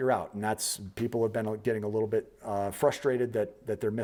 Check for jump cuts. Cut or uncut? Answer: uncut